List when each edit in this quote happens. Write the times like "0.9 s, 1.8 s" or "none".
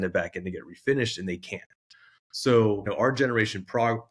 2.9 s